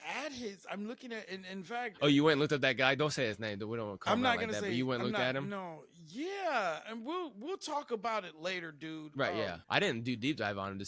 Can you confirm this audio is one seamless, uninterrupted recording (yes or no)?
no